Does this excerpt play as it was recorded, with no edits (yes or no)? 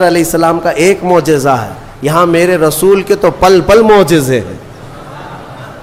yes